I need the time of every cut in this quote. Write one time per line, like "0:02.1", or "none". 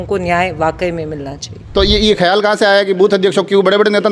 0:01.5